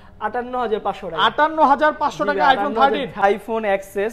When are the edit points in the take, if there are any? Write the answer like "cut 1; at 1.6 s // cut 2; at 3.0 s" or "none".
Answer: cut 1; at 3.2 s